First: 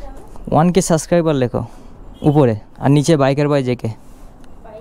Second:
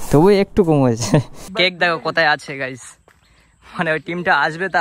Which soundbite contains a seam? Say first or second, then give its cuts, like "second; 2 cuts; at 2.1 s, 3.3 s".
second; 1 cut; at 1.5 s